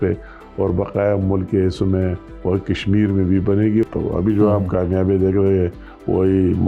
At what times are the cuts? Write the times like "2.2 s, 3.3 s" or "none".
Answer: 3.8 s